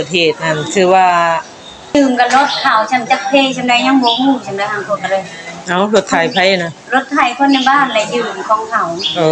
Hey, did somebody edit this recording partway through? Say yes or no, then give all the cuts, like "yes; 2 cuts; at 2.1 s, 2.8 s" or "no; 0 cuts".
yes; 1 cut; at 1.9 s